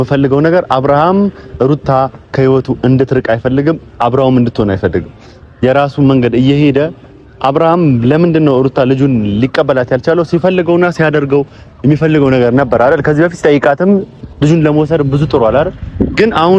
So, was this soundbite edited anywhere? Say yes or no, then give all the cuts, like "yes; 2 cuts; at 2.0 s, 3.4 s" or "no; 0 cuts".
no; 0 cuts